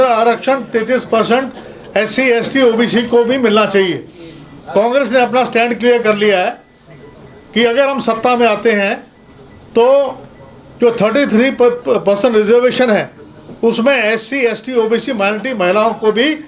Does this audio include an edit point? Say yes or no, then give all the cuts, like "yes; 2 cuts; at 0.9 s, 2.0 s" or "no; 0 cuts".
no; 0 cuts